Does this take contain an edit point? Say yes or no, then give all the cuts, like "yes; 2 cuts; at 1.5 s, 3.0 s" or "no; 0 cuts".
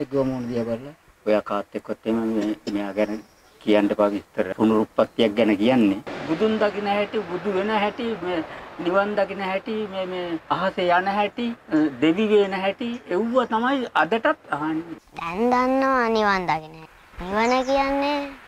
yes; 6 cuts; at 4.5 s, 6.1 s, 10.4 s, 11.6 s, 14.8 s, 16.9 s